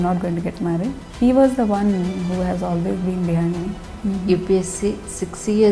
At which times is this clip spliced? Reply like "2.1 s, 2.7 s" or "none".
1.0 s, 3.9 s